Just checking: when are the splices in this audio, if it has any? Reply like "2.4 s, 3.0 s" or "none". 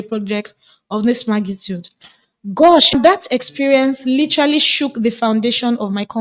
3.1 s